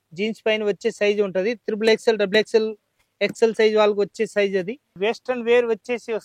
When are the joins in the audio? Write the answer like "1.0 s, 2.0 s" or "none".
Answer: 4.8 s

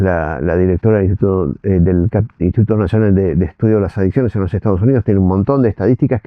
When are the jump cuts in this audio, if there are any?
none

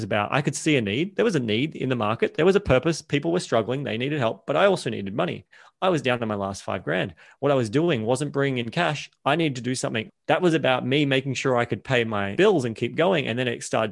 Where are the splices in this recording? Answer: 1.1 s, 10.0 s

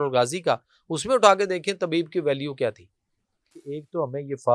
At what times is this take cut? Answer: 3.6 s

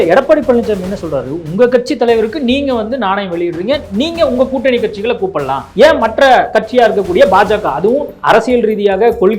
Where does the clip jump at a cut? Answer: 5.6 s, 6.5 s, 8.1 s

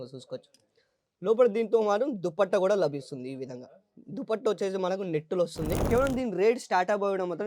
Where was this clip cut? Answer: 5.8 s

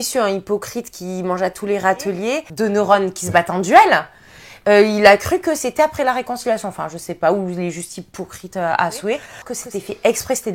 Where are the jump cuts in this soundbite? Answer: 2.5 s, 9.5 s

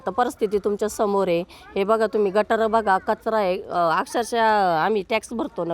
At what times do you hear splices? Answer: none

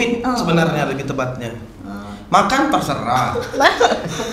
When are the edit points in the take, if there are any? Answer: none

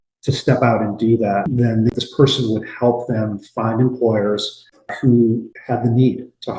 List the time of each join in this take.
1.9 s

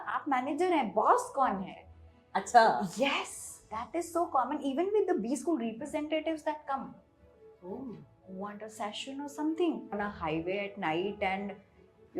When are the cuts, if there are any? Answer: 9.9 s

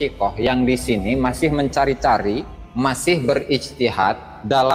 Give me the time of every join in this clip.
2.6 s

